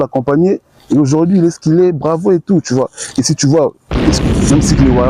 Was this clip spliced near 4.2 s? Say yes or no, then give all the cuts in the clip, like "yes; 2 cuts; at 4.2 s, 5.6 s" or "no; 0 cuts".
yes; 1 cut; at 4.2 s